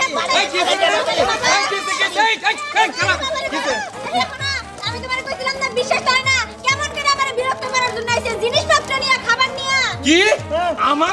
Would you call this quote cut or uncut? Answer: uncut